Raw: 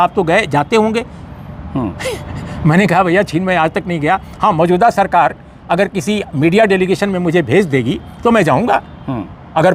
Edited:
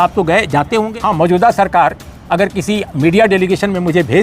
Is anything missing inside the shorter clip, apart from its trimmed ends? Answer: yes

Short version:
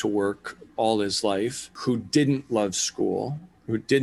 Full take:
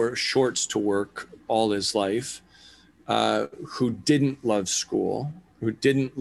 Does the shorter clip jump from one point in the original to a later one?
yes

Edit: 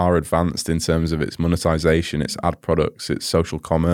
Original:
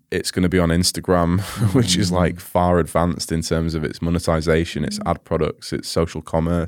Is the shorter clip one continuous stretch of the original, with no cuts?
yes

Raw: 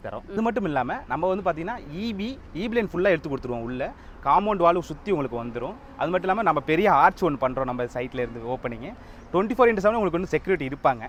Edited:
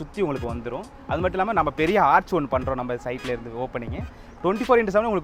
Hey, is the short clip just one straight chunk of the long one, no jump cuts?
yes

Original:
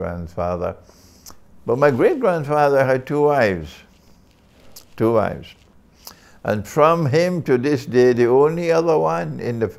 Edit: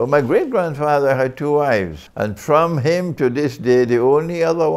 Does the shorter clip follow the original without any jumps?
no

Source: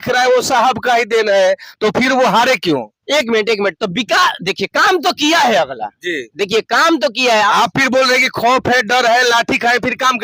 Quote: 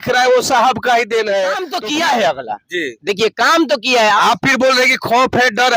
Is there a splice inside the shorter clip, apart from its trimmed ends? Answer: yes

